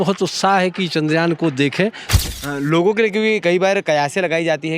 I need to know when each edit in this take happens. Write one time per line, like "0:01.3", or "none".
0:02.1